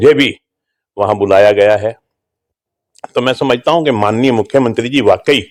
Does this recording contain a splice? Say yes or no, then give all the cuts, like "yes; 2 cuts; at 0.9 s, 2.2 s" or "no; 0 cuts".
no; 0 cuts